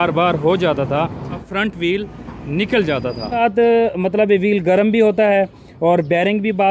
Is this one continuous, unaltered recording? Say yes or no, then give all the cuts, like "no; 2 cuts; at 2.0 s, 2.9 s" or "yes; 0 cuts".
no; 2 cuts; at 1.5 s, 3.4 s